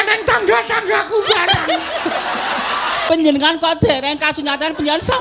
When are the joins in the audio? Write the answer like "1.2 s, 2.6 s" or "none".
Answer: 3.0 s

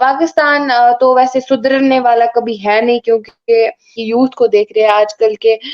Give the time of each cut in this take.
4.0 s

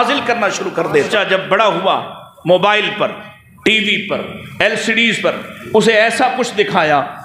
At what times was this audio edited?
1.1 s

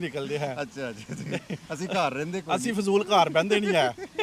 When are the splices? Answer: none

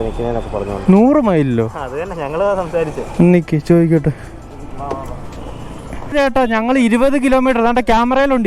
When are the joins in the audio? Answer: 6.1 s

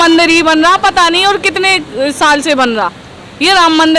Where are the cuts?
none

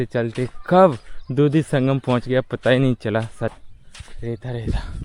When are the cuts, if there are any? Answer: 3.6 s

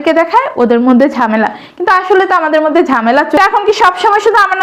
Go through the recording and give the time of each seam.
3.3 s

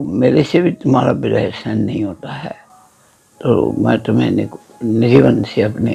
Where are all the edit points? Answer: none

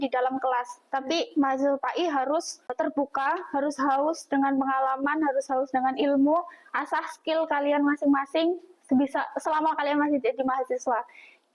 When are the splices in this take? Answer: 2.7 s

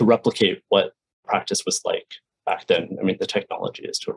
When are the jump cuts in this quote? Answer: 1.2 s

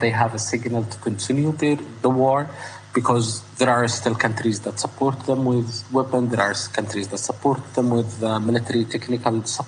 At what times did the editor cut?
none

